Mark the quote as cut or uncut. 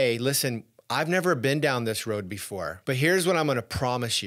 cut